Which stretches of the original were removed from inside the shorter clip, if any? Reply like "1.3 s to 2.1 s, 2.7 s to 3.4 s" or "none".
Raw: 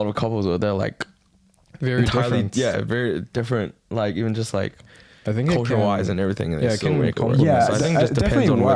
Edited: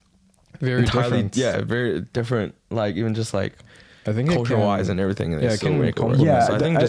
none